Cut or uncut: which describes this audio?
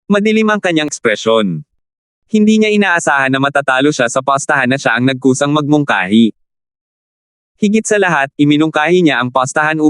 cut